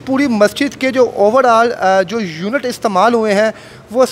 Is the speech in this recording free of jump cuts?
yes; 0 cuts

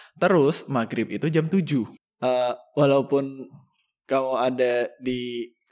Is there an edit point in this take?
yes; 1 cut; at 2.0 s

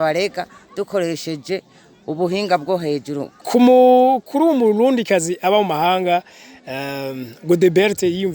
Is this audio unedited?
no; 1 cut; at 3.3 s

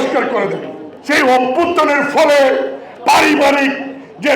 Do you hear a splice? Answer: yes; 1 cut; at 0.9 s

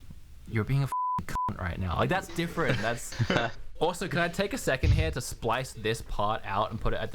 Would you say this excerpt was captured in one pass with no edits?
no; 1 cut; at 3.1 s

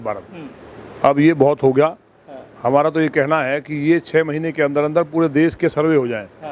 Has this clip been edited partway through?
no; 0 cuts

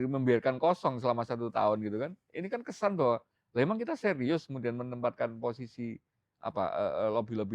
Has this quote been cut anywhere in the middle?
no; 0 cuts

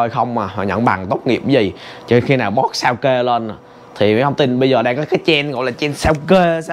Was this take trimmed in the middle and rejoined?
no; 0 cuts

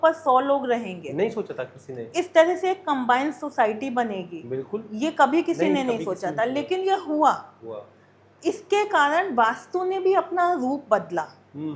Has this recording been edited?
no; 0 cuts

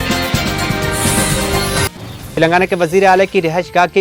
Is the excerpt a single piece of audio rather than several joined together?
yes; 0 cuts

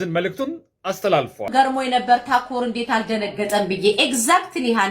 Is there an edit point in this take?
yes; 1 cut; at 1.4 s

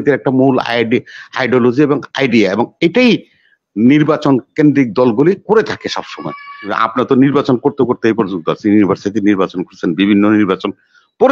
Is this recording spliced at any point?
yes; 1 cut; at 6.7 s

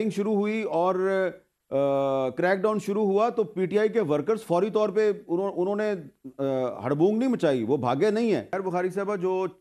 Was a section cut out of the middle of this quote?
yes; 1 cut; at 8.5 s

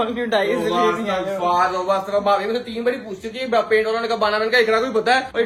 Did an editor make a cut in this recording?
no; 0 cuts

